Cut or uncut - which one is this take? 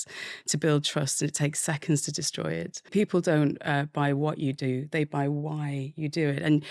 cut